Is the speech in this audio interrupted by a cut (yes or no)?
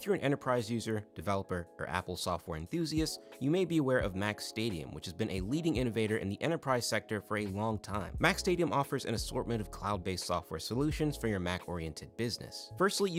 no